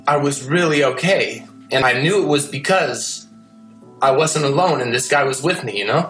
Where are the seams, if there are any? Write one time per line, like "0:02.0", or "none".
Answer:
0:01.8